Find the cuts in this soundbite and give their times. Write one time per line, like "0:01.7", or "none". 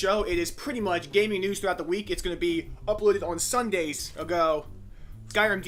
none

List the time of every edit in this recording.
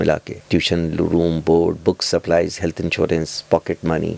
none

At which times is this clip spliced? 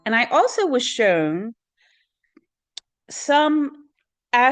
none

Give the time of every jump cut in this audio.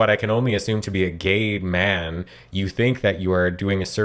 none

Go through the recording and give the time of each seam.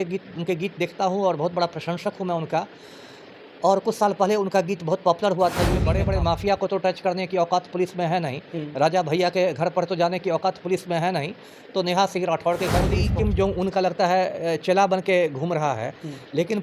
0:05.9
0:13.0

